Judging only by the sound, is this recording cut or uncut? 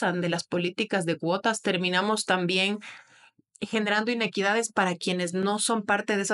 uncut